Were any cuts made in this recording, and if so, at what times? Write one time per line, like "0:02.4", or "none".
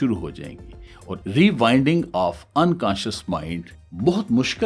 0:01.1